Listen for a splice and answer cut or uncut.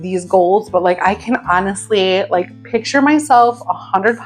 uncut